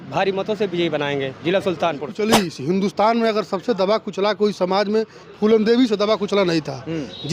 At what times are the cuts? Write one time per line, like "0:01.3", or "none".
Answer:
0:02.1